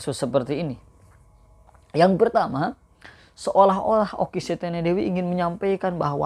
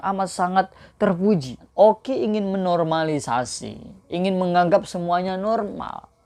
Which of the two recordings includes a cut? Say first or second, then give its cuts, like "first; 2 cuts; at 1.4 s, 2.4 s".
second; 1 cut; at 1.7 s